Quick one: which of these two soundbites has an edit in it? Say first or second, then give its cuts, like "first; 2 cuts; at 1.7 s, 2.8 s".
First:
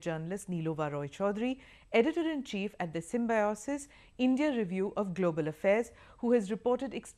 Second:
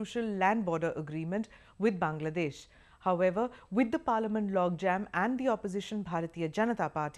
first; 1 cut; at 4.4 s